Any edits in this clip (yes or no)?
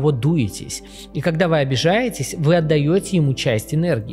no